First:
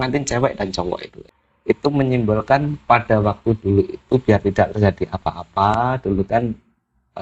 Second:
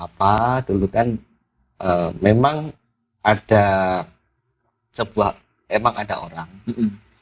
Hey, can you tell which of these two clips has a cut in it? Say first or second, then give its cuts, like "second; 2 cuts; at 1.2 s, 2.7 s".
first; 1 cut; at 1.2 s